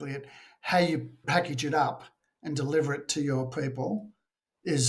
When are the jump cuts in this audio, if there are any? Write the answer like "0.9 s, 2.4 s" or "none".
1.2 s